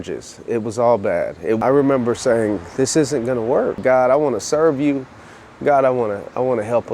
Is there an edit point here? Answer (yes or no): yes